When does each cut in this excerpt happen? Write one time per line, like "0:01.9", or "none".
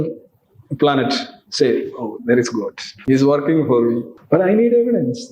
0:02.9
0:04.1